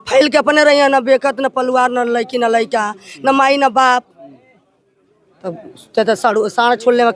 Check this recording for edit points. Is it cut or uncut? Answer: uncut